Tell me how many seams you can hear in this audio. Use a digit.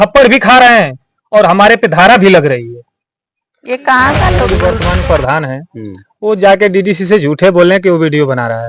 1